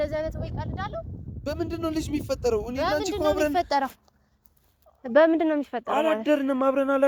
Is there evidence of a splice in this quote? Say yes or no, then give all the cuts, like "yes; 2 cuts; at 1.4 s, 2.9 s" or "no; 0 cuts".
no; 0 cuts